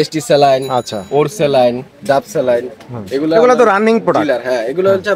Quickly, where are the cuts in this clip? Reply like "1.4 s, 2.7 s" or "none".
none